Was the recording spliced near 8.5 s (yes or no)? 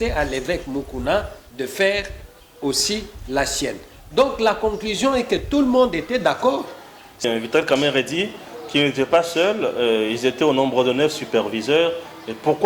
no